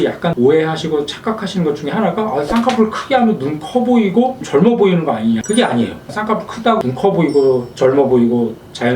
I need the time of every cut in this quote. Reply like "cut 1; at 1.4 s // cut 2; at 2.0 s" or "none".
cut 1; at 5.4 s // cut 2; at 6.1 s